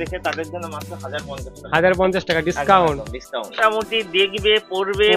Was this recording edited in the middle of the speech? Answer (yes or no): yes